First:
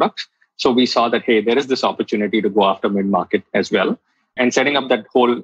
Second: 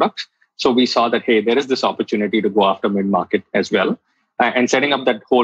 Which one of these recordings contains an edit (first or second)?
first